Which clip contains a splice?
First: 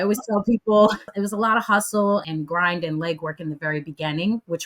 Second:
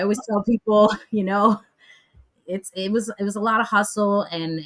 first; 2 cuts; at 1.1 s, 2.3 s

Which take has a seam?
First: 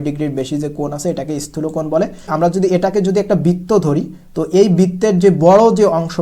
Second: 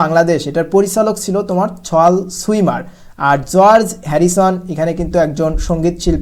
first; 1 cut; at 2.3 s

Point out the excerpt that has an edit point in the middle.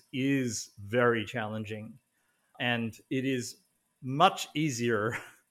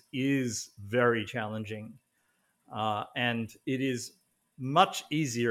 first; 1 cut; at 2.5 s

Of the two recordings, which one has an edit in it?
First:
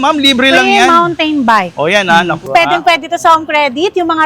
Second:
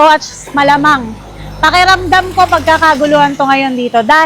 first; 1 cut; at 2.5 s

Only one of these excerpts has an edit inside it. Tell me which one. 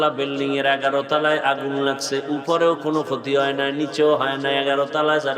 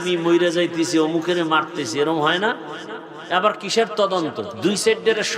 second; 1 cut; at 4.5 s

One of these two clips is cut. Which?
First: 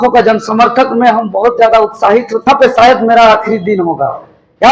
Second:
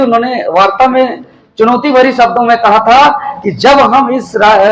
first; 1 cut; at 2.5 s

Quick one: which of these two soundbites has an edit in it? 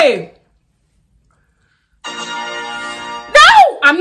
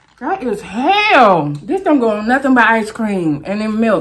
second; 1 cut; at 1.6 s

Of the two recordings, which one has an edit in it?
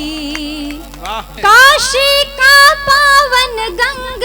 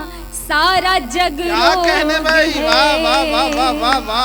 first; 1 cut; at 1.3 s

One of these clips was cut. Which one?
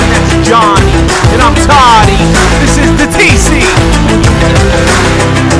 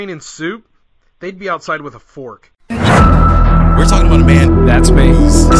second; 1 cut; at 2.5 s

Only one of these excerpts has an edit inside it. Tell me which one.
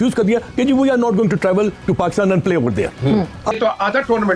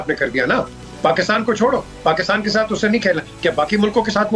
first; 1 cut; at 3.4 s

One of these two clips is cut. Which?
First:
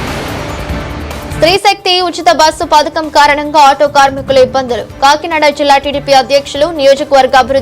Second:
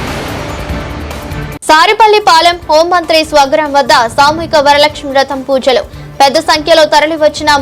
second; 1 cut; at 1.3 s

